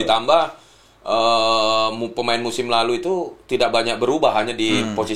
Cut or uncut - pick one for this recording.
uncut